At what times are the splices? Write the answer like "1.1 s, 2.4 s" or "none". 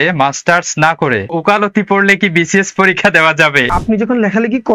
1.3 s, 3.7 s